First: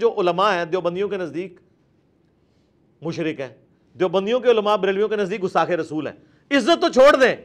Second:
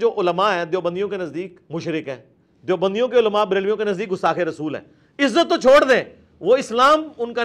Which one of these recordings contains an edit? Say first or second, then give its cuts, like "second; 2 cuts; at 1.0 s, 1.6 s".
second; 1 cut; at 1.6 s